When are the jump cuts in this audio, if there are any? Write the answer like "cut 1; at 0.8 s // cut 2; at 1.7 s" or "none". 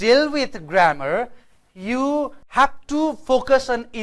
cut 1; at 2.4 s